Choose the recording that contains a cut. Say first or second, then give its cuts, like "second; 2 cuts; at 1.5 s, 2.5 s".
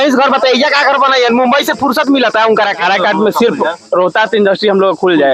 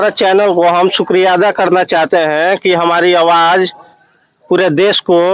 first; 1 cut; at 2.8 s